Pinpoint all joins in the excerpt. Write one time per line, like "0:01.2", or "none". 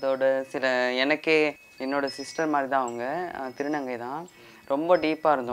0:01.7